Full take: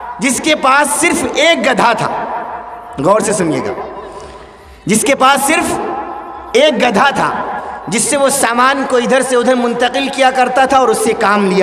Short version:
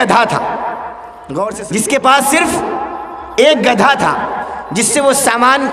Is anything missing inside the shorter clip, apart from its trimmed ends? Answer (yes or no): yes